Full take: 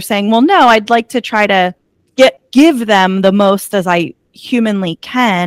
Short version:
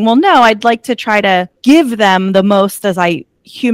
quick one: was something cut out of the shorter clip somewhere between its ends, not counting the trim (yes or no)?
yes